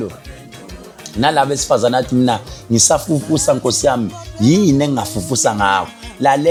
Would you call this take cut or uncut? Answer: uncut